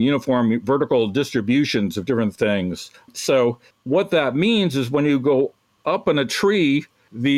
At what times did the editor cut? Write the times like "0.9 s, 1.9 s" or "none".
none